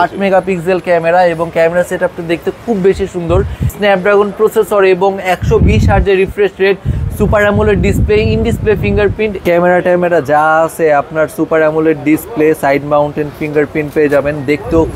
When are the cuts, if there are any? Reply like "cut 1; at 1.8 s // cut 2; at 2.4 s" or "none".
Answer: cut 1; at 3.8 s // cut 2; at 9.4 s